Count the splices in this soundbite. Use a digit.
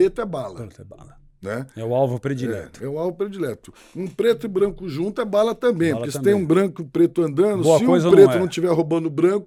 0